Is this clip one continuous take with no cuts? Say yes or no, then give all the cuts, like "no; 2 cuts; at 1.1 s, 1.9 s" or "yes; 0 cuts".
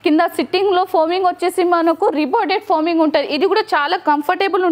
yes; 0 cuts